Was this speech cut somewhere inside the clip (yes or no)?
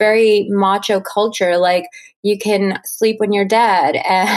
yes